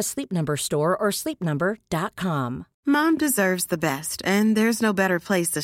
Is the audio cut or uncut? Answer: cut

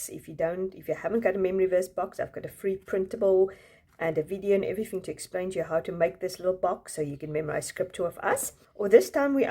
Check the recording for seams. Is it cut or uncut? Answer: cut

